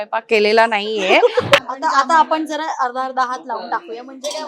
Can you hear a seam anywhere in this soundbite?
yes; 1 cut; at 1.6 s

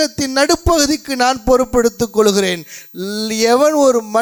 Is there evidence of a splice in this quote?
no; 0 cuts

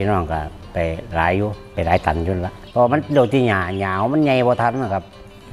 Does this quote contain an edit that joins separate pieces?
yes; 1 cut; at 2.6 s

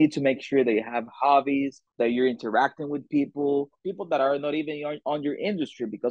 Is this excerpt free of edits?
no; 2 cuts; at 1.8 s, 3.8 s

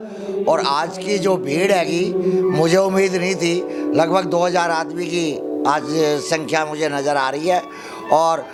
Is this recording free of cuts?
yes; 0 cuts

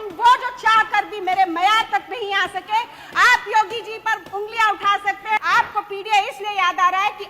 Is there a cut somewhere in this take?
yes; 1 cut; at 5.4 s

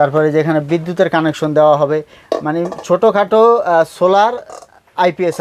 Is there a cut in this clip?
no; 0 cuts

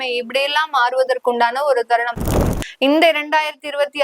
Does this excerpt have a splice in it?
yes; 1 cut; at 2.5 s

